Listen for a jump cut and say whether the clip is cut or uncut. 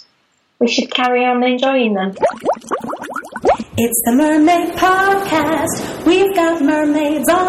cut